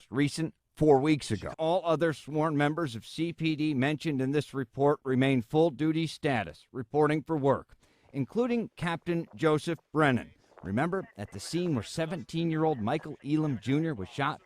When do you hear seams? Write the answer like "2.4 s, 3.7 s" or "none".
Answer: 1.5 s